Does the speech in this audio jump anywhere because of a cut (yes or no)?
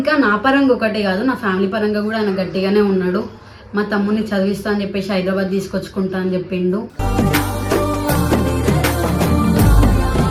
no